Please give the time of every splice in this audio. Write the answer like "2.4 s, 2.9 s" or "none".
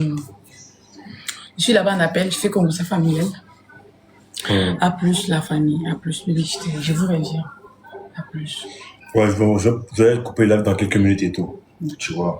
none